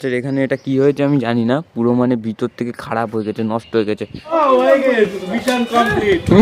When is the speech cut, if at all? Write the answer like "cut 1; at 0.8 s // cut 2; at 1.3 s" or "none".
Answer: cut 1; at 4.3 s